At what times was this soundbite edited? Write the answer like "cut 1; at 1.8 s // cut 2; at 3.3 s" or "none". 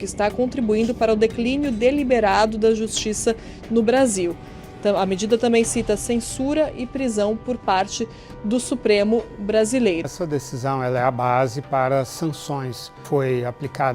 cut 1; at 10.1 s // cut 2; at 12.9 s